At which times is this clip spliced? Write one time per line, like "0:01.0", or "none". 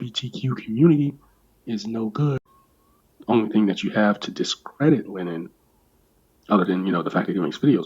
0:02.4